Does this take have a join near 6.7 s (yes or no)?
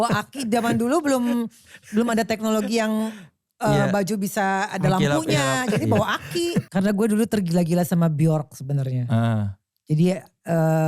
yes